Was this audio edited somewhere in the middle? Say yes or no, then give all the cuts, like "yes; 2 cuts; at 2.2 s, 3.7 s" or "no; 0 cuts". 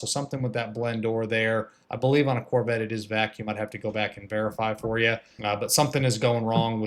yes; 1 cut; at 5.3 s